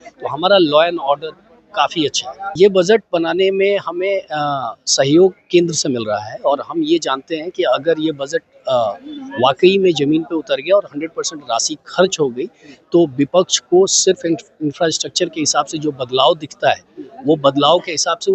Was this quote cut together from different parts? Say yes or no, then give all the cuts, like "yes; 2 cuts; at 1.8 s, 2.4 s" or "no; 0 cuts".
yes; 1 cut; at 2.5 s